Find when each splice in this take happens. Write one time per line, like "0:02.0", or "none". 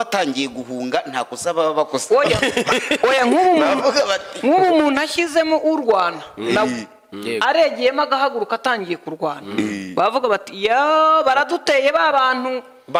none